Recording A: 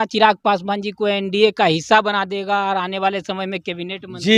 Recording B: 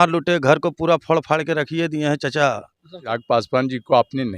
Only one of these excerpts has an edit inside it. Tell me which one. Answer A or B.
B